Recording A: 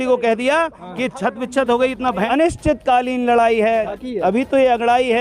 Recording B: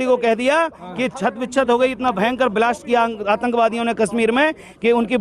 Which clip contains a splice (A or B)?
A